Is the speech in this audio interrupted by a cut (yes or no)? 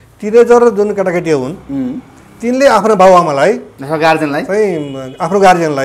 no